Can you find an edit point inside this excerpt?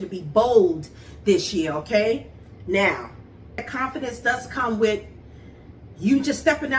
no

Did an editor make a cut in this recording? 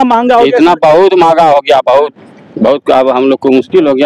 no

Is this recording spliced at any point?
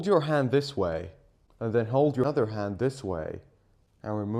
no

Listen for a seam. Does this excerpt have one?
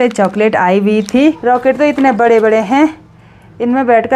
yes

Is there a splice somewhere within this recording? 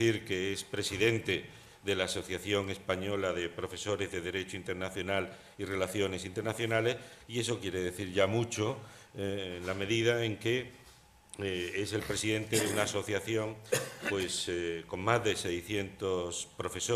yes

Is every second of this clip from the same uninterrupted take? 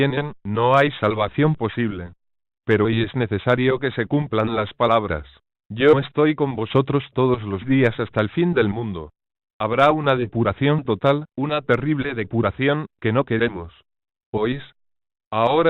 no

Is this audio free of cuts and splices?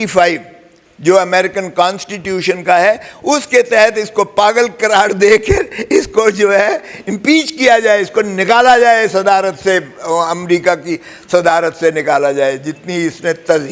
yes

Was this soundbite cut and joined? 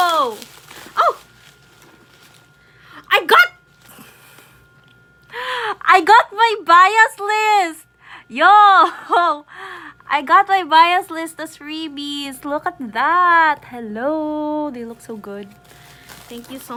no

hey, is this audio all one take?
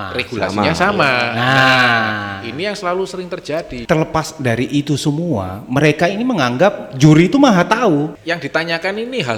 no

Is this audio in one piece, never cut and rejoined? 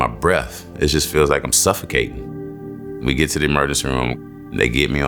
no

